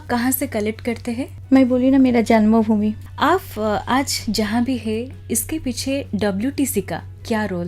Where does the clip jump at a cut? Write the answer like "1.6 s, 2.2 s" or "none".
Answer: 3.0 s